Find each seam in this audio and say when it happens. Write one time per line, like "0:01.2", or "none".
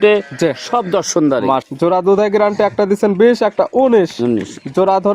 0:01.7